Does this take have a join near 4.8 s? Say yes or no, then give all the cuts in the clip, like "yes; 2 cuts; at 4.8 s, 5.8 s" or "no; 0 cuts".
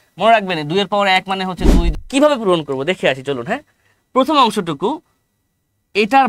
no; 1 cut; at 1.9 s